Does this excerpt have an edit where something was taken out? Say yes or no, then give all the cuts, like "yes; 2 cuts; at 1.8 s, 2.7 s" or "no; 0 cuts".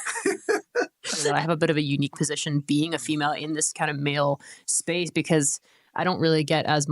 yes; 1 cut; at 1.3 s